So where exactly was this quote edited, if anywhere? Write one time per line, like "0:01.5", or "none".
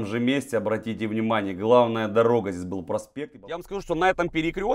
0:03.7